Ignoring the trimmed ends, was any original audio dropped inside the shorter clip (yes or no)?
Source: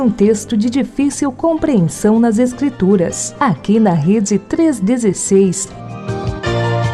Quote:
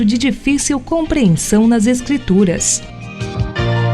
yes